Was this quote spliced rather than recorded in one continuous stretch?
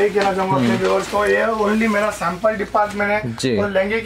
no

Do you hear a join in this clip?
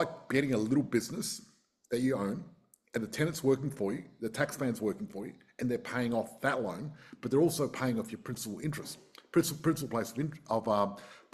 no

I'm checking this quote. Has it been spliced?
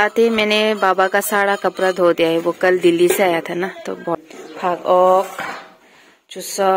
yes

